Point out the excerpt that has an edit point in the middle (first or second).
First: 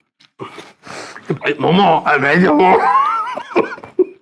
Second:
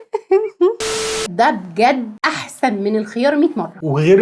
second